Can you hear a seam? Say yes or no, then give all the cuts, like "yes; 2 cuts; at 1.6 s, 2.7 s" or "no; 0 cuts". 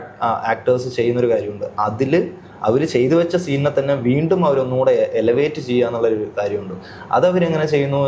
no; 0 cuts